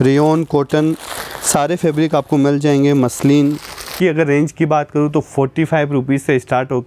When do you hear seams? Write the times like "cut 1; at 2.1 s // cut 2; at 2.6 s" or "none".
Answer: cut 1; at 3.9 s